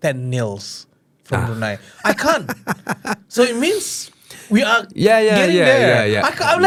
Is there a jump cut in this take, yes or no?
no